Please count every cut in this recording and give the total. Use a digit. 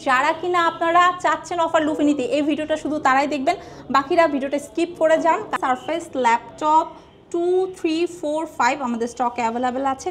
1